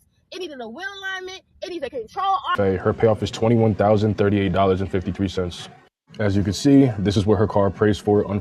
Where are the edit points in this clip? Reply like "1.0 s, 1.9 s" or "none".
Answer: 2.5 s